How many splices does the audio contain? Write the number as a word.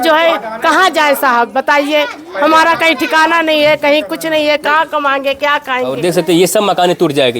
one